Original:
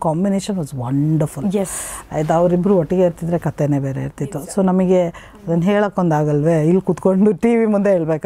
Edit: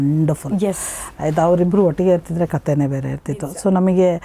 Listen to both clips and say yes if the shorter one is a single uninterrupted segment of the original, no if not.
yes